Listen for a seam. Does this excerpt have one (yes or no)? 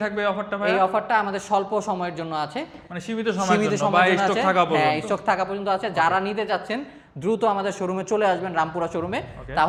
no